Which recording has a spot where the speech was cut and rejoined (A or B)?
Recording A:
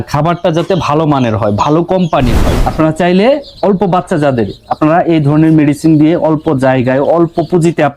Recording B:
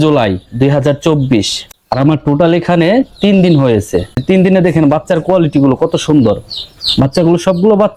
A